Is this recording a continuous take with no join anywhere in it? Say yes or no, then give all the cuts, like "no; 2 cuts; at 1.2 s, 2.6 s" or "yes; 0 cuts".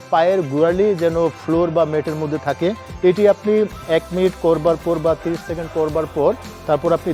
yes; 0 cuts